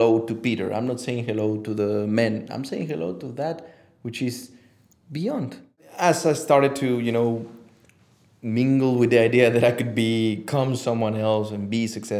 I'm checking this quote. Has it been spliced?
yes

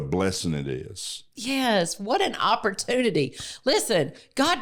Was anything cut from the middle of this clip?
no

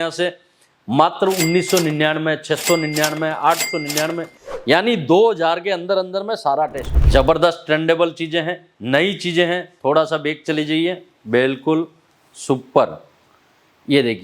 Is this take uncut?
no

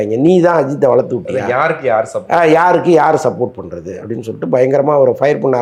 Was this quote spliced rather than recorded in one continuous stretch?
no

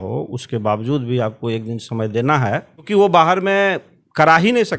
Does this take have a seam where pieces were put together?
yes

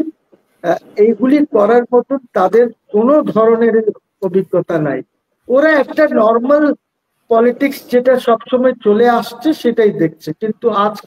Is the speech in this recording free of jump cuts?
yes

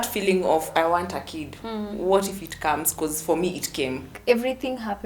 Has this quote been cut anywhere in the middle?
yes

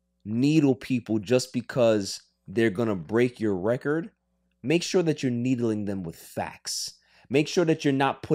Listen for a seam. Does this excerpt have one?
no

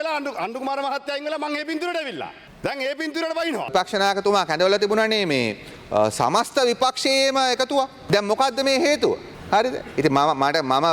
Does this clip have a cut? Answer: yes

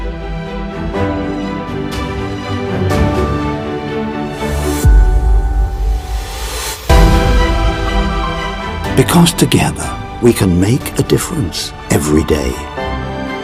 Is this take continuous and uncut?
yes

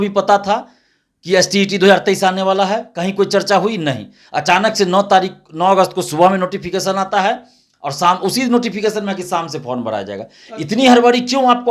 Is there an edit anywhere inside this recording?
no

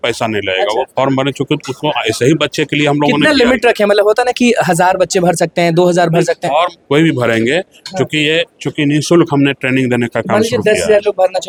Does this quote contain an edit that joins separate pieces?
no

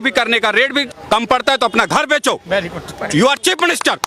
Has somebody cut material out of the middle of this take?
yes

